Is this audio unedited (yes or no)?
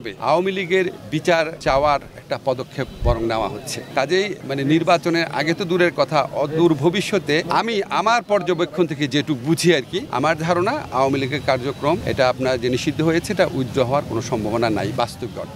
yes